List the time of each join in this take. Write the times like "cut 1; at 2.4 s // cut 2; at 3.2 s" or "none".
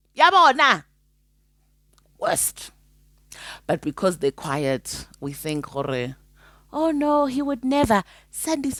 none